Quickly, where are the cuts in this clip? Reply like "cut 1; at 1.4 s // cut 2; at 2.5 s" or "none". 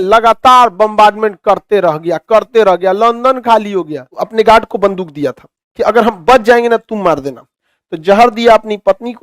cut 1; at 4.0 s